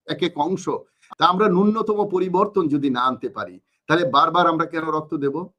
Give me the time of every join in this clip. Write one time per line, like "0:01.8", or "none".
0:01.0